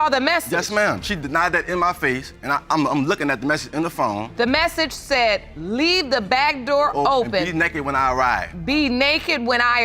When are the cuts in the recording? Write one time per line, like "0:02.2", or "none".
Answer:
0:04.3